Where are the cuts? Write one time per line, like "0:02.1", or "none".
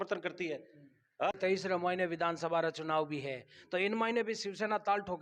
0:01.3